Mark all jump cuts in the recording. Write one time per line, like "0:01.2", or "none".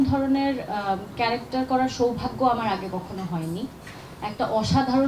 none